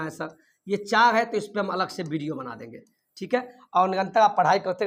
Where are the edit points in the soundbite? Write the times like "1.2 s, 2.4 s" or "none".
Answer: none

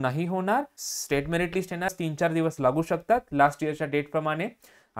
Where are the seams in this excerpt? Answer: 0.9 s, 1.9 s

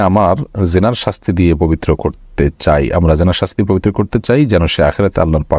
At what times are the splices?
none

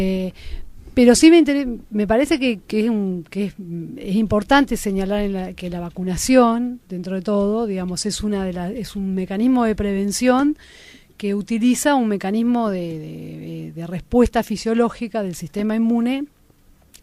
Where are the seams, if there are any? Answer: 1.5 s

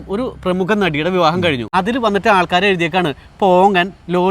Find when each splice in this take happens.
1.7 s

